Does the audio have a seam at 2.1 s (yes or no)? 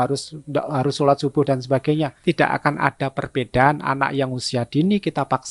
yes